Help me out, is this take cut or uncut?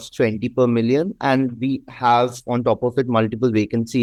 uncut